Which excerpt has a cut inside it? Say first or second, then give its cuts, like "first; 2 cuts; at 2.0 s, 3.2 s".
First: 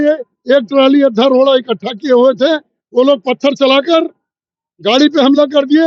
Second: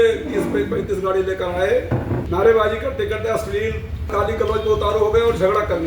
second; 2 cuts; at 2.2 s, 4.1 s